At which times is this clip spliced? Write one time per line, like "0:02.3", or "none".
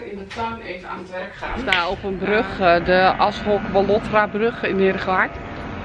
0:01.7